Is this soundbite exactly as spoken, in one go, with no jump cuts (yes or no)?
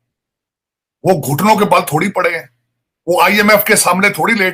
yes